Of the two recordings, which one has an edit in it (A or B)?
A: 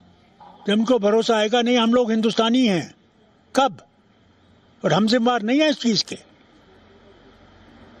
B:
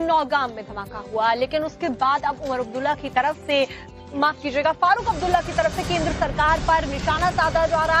B